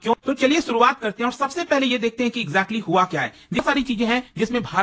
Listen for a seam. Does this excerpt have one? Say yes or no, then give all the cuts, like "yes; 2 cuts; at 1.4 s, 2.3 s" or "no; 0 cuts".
yes; 1 cut; at 3.6 s